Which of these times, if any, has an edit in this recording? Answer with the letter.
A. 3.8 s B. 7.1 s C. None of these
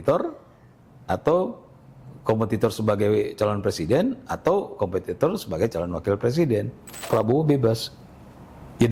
B